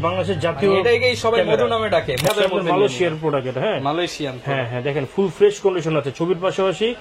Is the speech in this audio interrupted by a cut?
yes; 1 cut; at 2.3 s

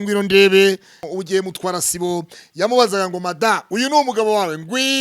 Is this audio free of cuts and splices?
no; 1 cut; at 1.0 s

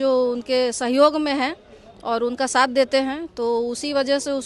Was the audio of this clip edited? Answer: no; 0 cuts

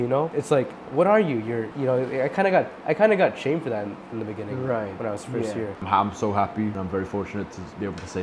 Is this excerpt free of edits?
no; 1 cut; at 5.7 s

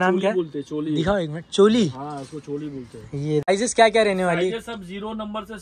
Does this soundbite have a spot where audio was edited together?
yes; 1 cut; at 3.5 s

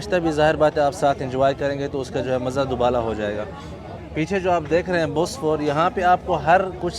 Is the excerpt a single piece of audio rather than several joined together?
yes; 0 cuts

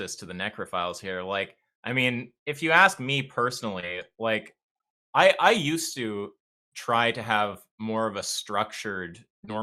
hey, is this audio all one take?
yes; 0 cuts

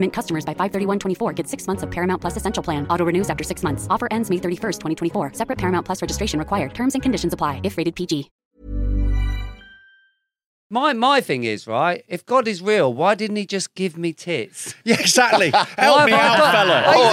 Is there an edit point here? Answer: yes; 1 cut; at 10.5 s

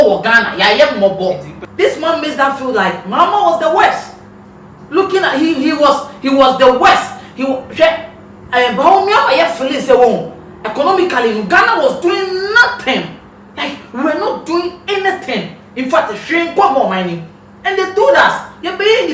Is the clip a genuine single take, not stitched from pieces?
no; 1 cut; at 1.6 s

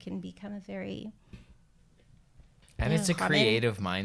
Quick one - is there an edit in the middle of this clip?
no; 0 cuts

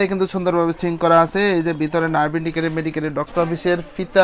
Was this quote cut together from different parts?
yes; 1 cut; at 3.3 s

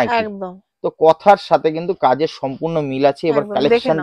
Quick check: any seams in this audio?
no; 0 cuts

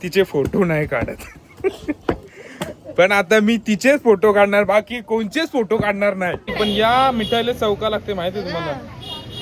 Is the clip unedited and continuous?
no; 1 cut; at 6.5 s

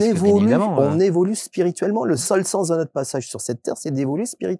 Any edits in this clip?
no; 0 cuts

